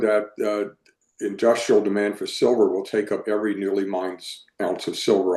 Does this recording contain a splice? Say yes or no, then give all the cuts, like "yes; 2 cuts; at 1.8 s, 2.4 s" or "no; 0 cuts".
no; 0 cuts